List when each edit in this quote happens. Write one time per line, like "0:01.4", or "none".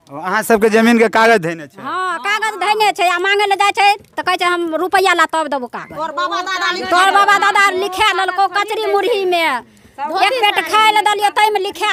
none